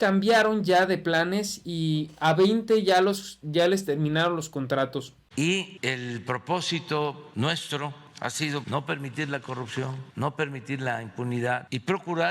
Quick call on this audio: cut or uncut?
cut